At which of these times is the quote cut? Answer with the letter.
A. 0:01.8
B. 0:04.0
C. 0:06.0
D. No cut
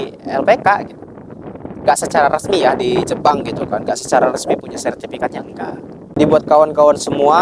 C